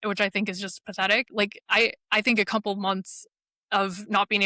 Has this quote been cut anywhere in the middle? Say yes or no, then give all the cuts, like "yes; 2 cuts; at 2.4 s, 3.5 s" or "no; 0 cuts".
yes; 1 cut; at 1.3 s